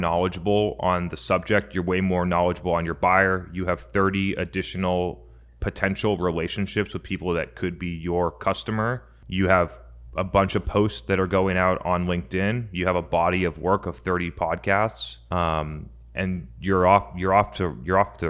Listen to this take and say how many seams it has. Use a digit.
0